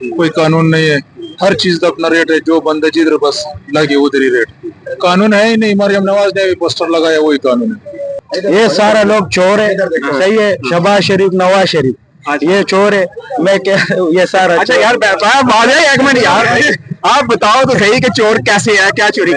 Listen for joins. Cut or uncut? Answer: cut